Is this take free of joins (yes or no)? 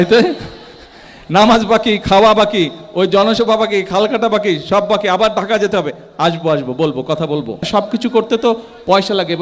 no